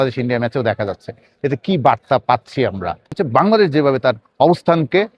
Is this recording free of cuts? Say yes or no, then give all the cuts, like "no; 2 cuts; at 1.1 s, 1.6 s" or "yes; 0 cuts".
no; 1 cut; at 3.2 s